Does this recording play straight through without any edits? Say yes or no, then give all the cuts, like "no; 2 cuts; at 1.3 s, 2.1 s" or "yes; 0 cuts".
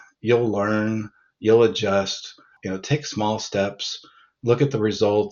no; 1 cut; at 2.6 s